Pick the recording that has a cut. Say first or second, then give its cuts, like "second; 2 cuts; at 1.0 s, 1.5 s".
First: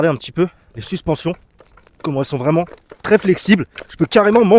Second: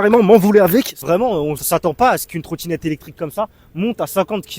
second; 1 cut; at 1.4 s